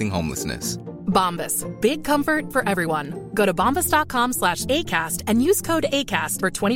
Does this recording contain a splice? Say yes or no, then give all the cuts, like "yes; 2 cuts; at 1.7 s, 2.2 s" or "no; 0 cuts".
no; 0 cuts